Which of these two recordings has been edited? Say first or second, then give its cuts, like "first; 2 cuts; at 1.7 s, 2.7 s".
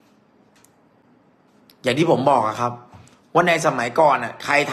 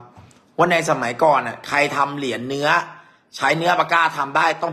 first; 1 cut; at 1.0 s